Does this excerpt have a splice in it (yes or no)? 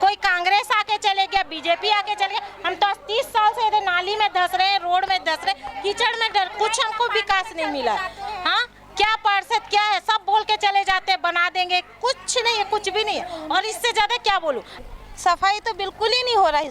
yes